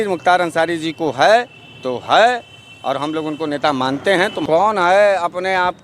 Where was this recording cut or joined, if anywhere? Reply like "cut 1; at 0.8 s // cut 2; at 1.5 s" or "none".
cut 1; at 4.4 s